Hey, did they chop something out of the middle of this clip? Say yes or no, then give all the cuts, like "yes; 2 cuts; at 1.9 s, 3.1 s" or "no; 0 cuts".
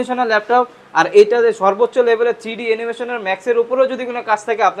no; 0 cuts